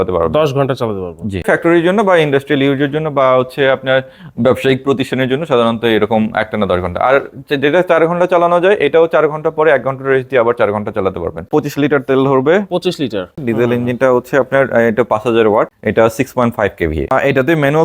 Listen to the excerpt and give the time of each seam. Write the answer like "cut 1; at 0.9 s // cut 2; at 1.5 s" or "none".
cut 1; at 1.4 s // cut 2; at 11.5 s // cut 3; at 13.4 s // cut 4; at 15.8 s // cut 5; at 17.1 s